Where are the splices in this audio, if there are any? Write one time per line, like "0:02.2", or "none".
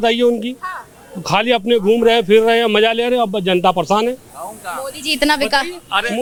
none